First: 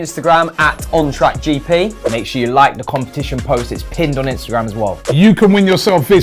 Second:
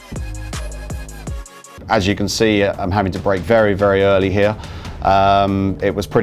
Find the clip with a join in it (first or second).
second